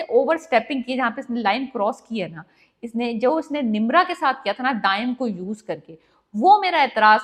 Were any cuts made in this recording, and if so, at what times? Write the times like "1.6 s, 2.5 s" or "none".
none